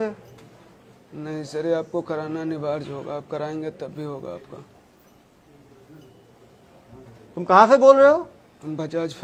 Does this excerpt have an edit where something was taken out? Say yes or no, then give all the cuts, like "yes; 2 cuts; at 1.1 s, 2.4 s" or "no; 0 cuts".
no; 0 cuts